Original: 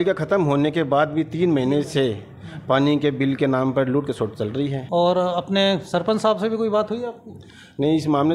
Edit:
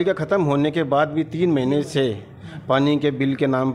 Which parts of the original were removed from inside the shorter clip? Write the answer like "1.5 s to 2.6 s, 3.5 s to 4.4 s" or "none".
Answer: none